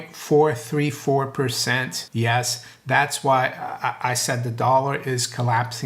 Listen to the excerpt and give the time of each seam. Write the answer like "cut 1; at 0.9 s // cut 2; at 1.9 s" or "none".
cut 1; at 2.0 s